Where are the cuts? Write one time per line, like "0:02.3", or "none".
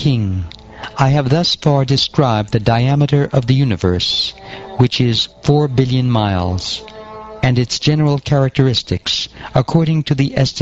none